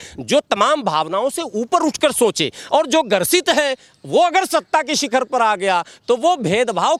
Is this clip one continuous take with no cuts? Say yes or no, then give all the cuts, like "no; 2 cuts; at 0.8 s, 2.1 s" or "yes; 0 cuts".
yes; 0 cuts